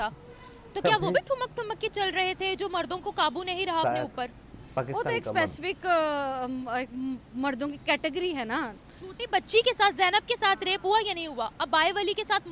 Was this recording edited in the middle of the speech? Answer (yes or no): no